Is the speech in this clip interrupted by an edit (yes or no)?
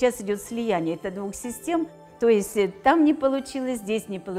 yes